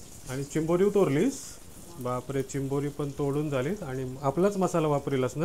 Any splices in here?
no; 0 cuts

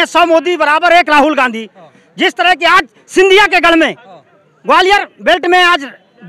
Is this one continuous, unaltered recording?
yes; 0 cuts

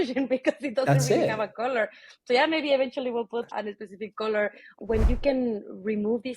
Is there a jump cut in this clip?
yes; 1 cut; at 4.7 s

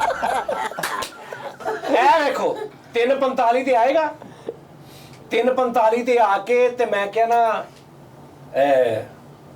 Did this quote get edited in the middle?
yes; 1 cut; at 1.6 s

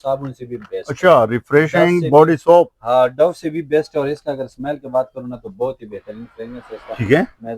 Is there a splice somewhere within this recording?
no; 0 cuts

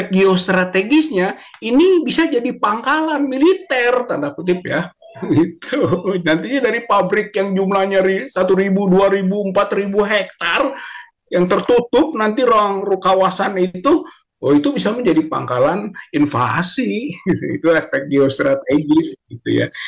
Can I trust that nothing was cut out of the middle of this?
yes; 0 cuts

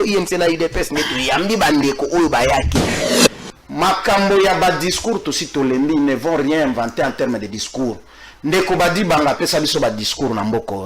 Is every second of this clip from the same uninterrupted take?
no; 1 cut; at 3.0 s

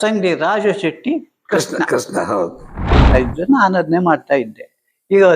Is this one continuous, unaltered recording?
no; 1 cut; at 3.1 s

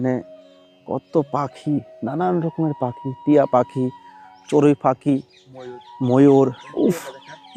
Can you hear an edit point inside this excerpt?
no; 0 cuts

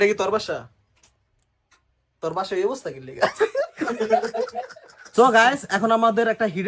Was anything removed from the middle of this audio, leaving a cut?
yes; 1 cut; at 5.0 s

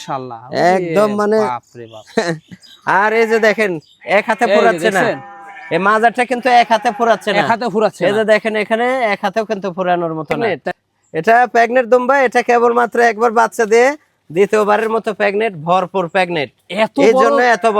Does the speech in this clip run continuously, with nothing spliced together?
no; 1 cut; at 10.4 s

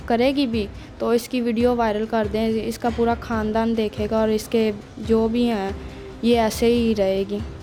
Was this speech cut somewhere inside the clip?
no; 0 cuts

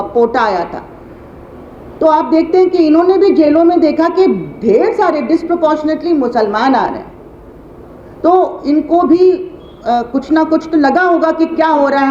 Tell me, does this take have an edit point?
no; 0 cuts

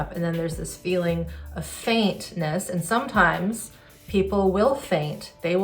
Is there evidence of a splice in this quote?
no; 0 cuts

